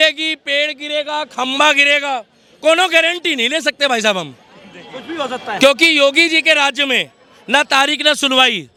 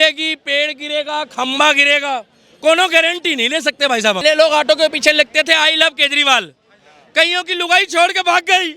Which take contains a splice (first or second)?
second